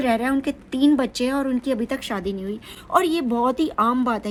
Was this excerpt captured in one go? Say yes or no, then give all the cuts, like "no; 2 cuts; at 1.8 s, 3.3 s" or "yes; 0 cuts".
yes; 0 cuts